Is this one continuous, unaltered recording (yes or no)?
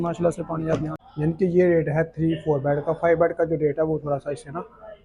no